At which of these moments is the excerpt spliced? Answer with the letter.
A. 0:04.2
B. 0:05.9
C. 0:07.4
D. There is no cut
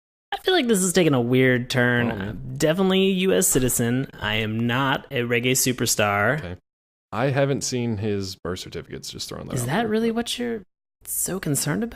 C